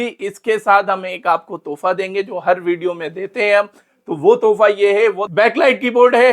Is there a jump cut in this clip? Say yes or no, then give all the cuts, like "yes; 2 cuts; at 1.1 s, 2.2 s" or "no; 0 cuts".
yes; 1 cut; at 5.2 s